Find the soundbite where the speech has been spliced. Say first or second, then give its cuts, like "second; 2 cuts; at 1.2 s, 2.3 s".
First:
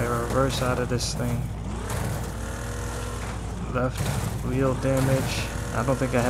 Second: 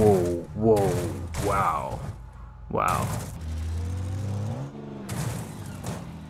second; 1 cut; at 3.4 s